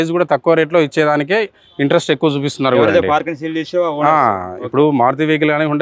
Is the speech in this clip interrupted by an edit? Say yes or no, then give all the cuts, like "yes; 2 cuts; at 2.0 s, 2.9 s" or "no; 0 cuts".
no; 0 cuts